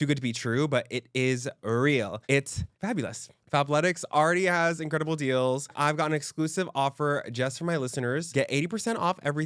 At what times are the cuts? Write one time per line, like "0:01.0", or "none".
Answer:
0:03.4
0:05.7
0:08.3